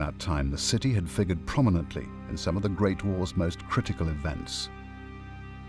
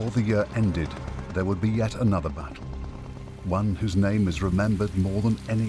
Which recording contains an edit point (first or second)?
first